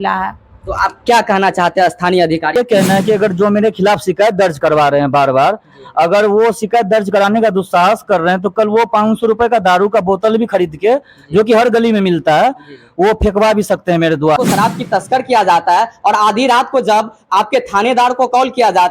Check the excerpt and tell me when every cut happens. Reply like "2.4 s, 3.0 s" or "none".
2.5 s, 14.4 s

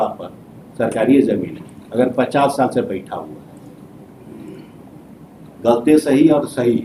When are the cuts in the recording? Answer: none

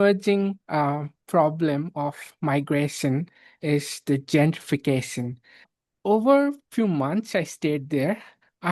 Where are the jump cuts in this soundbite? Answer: 5.7 s

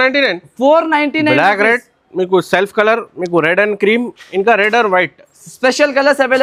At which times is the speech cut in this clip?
none

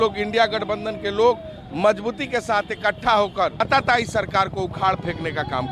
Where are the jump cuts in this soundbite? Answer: 3.6 s

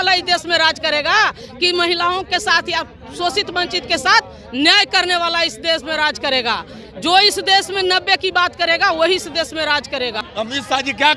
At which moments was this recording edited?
10.3 s

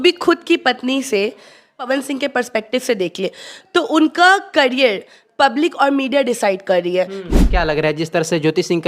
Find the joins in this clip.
1.9 s, 7.2 s

